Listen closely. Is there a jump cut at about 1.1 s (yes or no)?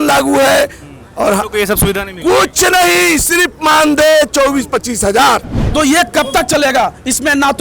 no